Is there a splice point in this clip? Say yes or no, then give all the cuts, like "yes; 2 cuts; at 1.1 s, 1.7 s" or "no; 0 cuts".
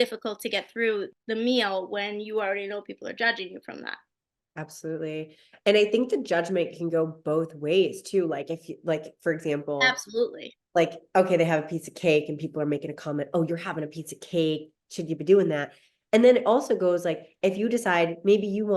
yes; 1 cut; at 1.2 s